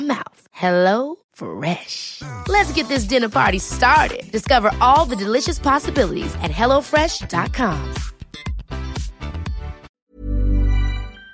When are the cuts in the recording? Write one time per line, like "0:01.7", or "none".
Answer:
0:09.9